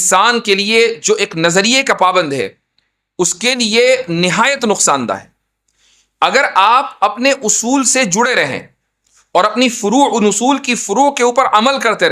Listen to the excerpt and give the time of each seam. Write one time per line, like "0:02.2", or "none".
none